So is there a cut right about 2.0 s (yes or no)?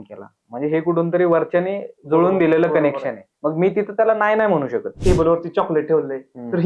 no